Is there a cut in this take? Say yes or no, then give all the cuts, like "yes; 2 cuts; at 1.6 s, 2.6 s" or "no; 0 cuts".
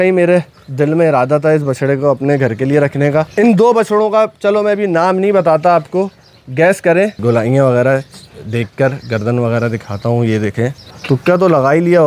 yes; 3 cuts; at 3.3 s, 7.2 s, 10.9 s